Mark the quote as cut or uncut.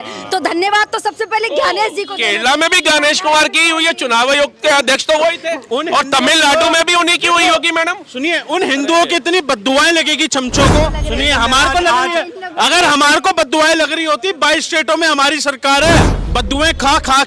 cut